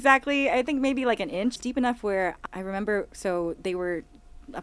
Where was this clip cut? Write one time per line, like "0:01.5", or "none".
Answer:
0:01.6
0:02.4